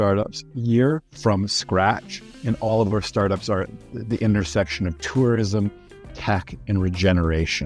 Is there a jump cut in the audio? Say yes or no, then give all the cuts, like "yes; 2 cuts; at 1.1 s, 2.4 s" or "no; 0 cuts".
yes; 1 cut; at 1.1 s